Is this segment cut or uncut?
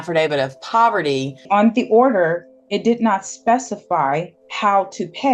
cut